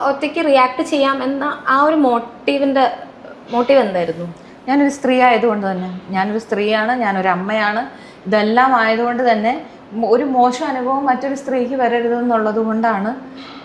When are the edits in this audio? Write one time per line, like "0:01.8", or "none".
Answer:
none